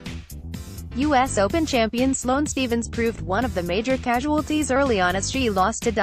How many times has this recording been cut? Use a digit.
1